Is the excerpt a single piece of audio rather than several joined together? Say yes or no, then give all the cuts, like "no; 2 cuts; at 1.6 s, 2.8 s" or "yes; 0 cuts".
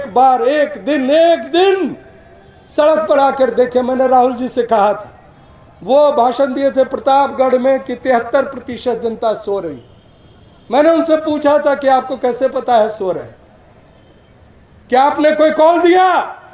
yes; 0 cuts